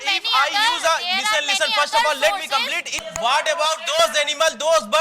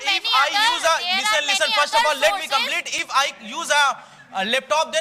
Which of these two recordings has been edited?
first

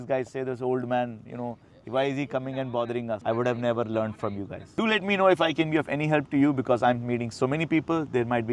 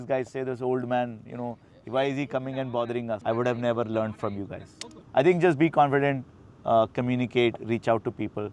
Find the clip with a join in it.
first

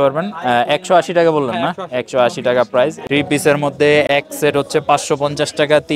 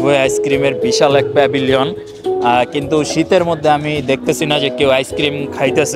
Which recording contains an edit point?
first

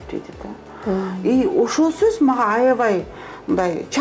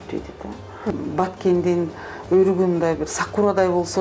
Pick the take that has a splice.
second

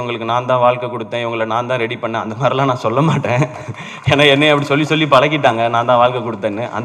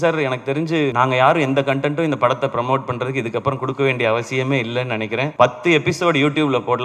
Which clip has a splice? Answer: second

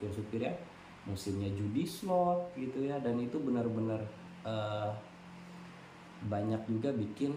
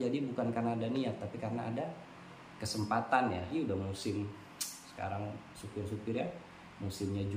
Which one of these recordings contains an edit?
second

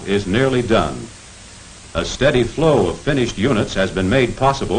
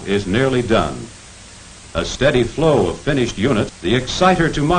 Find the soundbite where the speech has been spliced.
first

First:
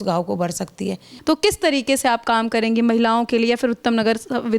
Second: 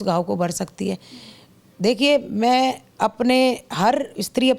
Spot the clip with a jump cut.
first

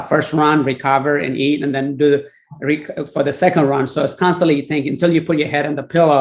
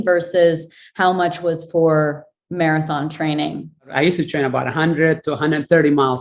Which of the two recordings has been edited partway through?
second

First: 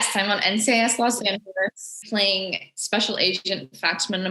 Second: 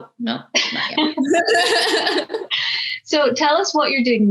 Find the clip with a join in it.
first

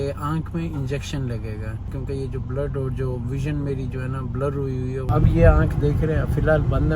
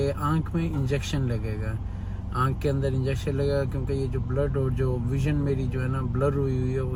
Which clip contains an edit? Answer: first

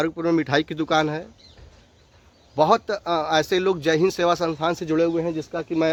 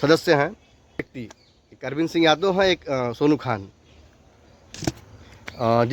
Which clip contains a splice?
second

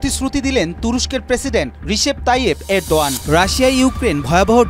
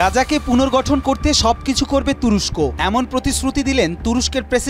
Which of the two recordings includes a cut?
first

